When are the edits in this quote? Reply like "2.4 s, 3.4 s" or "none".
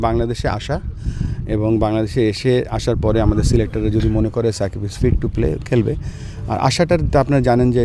none